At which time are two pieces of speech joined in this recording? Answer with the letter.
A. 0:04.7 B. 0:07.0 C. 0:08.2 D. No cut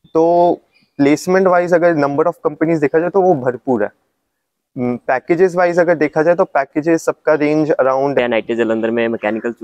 C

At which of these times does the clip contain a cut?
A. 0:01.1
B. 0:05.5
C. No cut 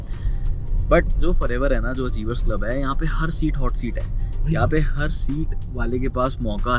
C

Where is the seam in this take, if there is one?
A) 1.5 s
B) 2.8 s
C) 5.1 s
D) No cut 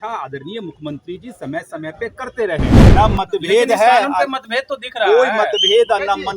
B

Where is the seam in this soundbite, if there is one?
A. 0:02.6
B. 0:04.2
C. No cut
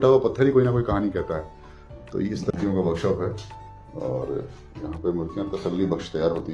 A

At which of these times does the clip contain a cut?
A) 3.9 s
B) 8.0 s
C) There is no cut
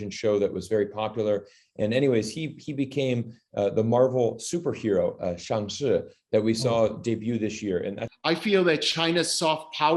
B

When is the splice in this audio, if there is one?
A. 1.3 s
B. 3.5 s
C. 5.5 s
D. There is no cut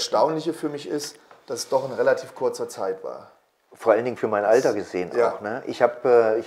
D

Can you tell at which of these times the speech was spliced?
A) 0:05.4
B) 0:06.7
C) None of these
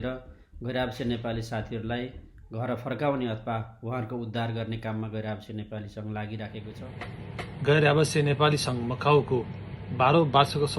B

